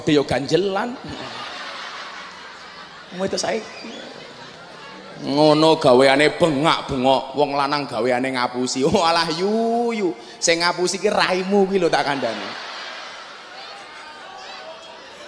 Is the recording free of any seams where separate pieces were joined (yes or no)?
yes